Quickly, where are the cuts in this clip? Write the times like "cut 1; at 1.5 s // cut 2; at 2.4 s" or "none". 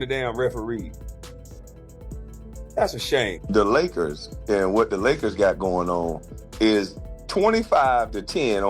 cut 1; at 3.4 s